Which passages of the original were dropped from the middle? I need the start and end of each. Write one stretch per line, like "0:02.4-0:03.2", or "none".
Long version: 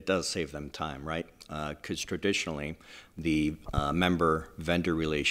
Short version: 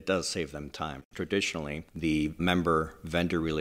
0:01.1-0:02.0
0:03.3-0:03.9